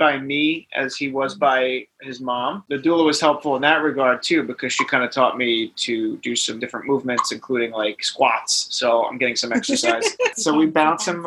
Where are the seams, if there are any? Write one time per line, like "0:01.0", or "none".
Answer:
0:02.7
0:06.6
0:10.3